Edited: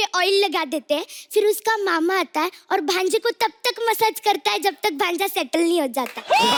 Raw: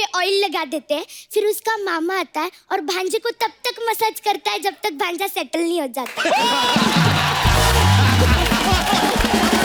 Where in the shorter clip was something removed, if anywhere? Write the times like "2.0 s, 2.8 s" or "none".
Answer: none